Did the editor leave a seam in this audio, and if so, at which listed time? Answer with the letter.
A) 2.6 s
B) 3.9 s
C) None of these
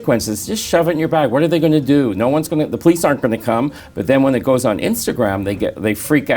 B